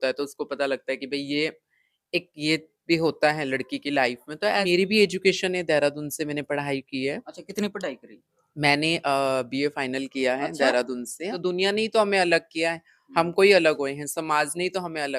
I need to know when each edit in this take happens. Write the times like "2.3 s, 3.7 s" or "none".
4.6 s, 11.4 s

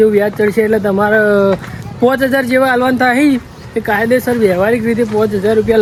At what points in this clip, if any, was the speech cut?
none

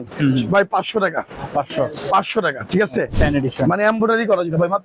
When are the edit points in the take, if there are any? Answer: 3.1 s

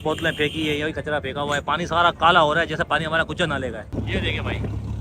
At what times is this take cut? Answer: 3.9 s

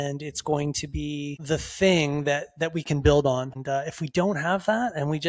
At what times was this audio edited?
1.4 s, 3.6 s

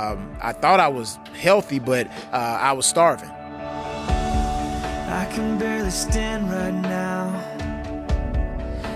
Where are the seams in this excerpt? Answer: 3.2 s

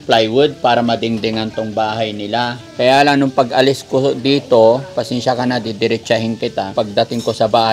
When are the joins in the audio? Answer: 2.6 s, 6.7 s

